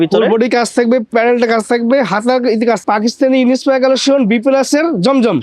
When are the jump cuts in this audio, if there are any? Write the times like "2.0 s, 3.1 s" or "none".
2.8 s